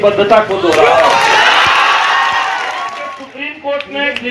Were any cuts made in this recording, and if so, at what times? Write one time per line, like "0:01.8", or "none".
0:03.1